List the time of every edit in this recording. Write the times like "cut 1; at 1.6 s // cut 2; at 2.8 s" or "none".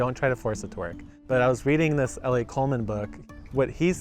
cut 1; at 1.1 s // cut 2; at 3.1 s